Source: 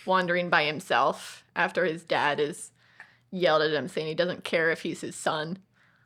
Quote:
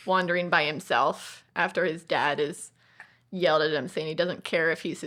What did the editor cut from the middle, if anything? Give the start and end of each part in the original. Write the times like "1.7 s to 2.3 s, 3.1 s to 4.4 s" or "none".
none